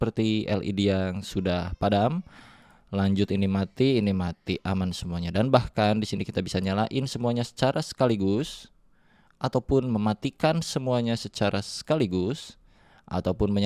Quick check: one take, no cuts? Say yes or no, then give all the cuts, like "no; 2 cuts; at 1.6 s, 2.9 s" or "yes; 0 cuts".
yes; 0 cuts